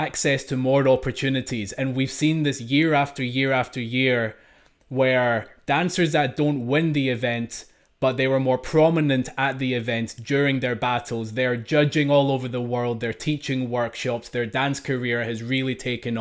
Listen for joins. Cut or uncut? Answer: uncut